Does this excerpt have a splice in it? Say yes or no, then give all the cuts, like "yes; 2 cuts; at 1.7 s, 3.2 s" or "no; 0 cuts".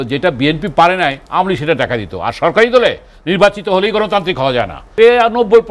yes; 1 cut; at 4.8 s